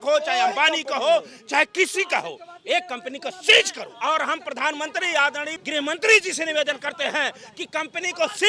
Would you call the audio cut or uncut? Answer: cut